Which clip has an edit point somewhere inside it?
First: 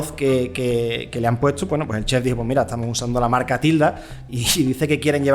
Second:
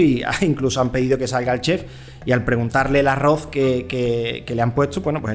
first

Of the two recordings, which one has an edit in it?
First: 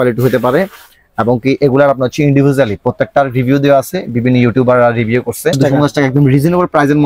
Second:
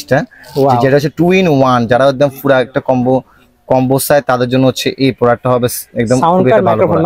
first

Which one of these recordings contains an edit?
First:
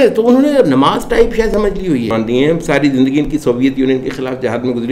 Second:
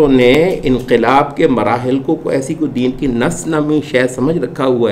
first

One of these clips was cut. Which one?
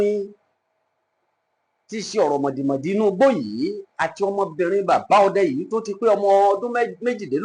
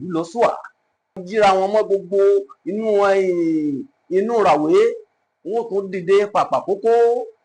second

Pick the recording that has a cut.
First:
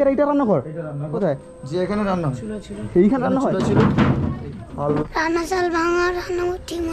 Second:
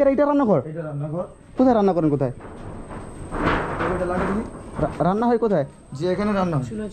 first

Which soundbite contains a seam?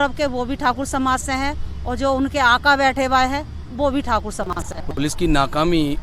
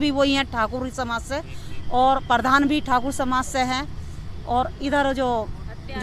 first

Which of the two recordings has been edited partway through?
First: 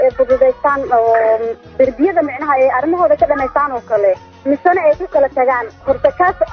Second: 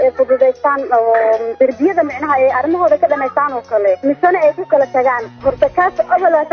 second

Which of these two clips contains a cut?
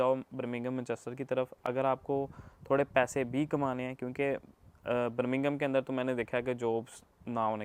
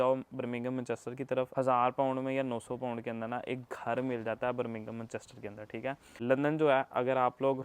second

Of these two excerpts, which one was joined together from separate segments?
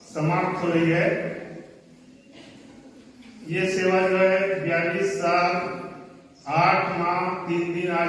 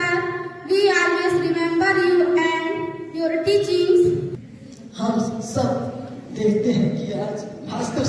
second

